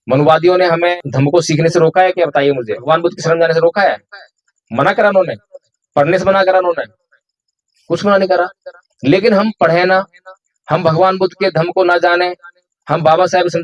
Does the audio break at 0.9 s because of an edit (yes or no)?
yes